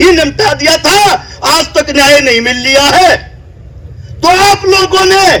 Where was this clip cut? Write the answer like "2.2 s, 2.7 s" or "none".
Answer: none